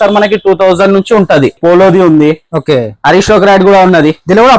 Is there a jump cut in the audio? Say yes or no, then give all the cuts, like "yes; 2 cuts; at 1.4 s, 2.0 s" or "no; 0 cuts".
yes; 1 cut; at 1.6 s